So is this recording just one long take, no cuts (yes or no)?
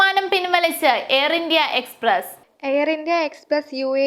yes